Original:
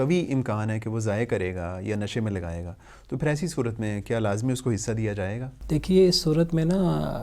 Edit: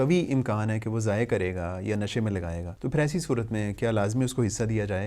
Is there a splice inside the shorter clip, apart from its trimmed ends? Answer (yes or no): yes